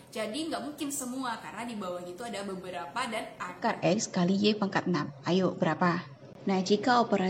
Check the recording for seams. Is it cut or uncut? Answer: cut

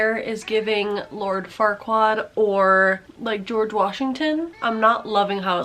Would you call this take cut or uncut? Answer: uncut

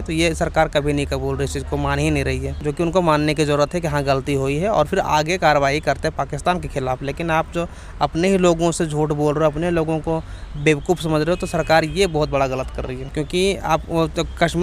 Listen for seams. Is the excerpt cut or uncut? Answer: uncut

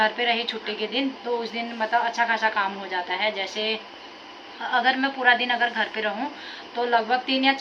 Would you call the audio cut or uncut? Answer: uncut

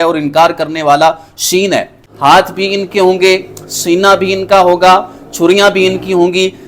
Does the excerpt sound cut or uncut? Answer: cut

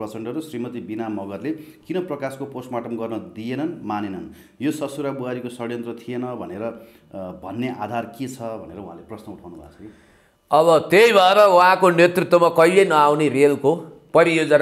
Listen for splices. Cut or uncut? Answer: uncut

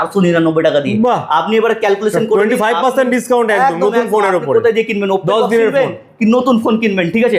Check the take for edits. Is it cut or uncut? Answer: uncut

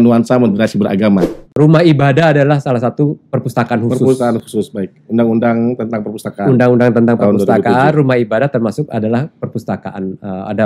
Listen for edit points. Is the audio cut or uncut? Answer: cut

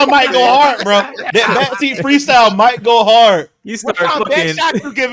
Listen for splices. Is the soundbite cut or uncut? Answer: uncut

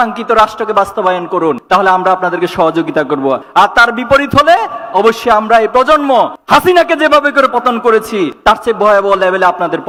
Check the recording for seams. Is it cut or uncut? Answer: uncut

